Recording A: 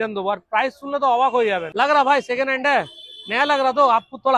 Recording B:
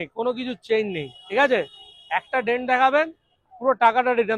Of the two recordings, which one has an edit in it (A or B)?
A